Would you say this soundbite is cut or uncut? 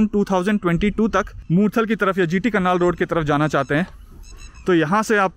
cut